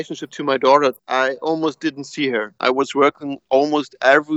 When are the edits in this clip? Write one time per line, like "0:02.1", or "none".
0:01.0
0:02.5